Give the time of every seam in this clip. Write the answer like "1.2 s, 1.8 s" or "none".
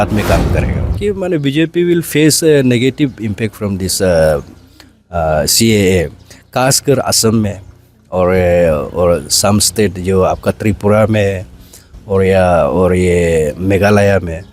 1.0 s